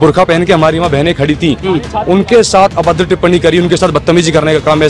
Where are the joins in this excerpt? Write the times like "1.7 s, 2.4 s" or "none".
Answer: none